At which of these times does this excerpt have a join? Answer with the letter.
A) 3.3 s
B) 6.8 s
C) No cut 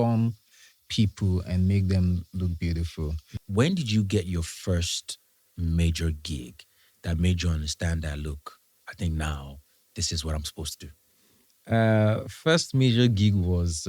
A